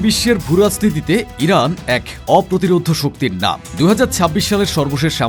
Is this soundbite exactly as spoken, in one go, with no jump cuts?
yes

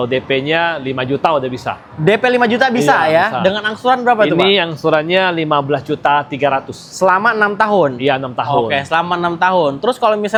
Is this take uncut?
yes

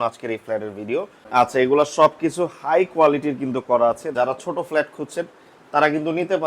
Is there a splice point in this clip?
yes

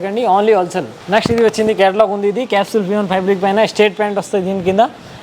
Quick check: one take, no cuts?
yes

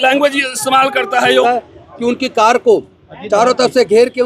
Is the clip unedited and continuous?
no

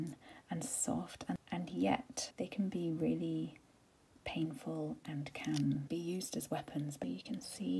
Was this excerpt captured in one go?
no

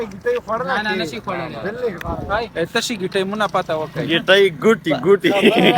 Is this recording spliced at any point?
no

